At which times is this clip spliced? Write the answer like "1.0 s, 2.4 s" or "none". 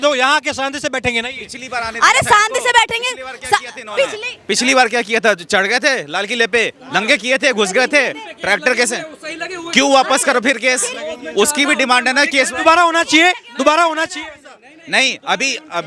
none